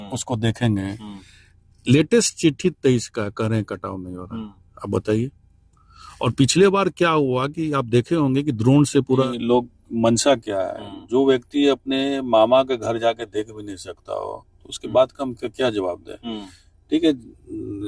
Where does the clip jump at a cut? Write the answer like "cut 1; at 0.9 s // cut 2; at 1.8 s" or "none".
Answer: cut 1; at 9.3 s